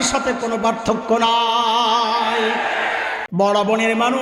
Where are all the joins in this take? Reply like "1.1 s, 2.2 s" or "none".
3.2 s